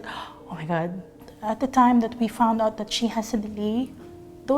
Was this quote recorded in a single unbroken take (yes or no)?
no